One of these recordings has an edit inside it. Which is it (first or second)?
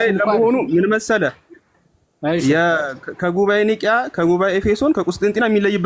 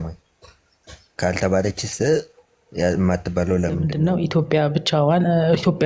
second